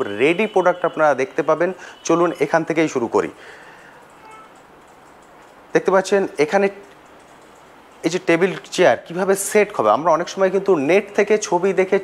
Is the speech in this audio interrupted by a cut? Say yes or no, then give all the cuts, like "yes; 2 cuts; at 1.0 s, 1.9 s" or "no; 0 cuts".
no; 0 cuts